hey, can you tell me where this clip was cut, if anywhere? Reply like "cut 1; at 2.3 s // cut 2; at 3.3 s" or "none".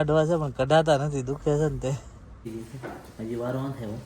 cut 1; at 2.5 s